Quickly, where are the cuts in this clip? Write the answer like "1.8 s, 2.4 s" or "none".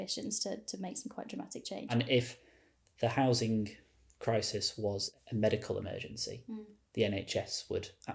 1.9 s, 5.1 s